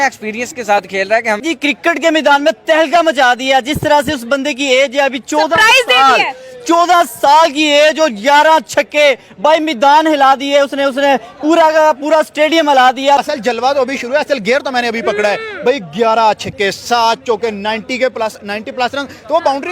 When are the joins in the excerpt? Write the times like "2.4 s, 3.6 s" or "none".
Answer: 1.4 s, 13.2 s